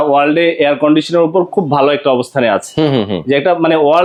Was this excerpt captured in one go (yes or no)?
yes